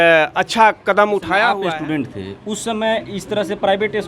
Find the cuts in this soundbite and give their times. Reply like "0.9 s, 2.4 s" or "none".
1.6 s